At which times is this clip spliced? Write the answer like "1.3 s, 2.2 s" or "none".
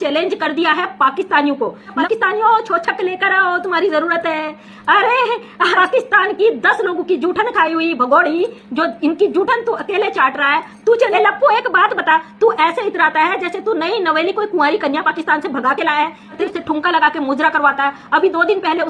2.0 s, 5.7 s, 11.1 s, 16.4 s